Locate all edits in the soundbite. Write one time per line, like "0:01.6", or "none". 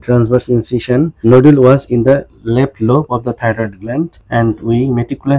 0:01.1
0:04.2